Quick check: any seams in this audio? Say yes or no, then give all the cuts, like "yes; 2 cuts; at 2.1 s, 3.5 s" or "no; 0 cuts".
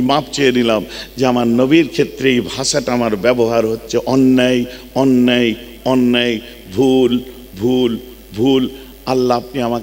no; 0 cuts